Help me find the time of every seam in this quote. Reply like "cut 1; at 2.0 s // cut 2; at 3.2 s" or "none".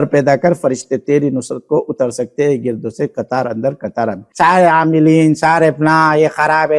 cut 1; at 4.2 s